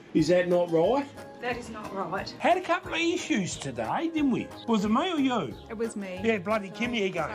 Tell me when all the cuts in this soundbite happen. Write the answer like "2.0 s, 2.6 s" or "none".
2.3 s, 4.5 s